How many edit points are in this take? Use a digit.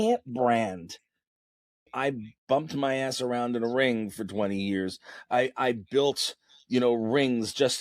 1